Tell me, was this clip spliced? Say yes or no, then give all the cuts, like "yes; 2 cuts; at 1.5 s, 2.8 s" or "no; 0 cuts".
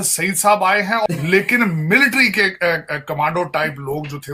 yes; 1 cut; at 1.1 s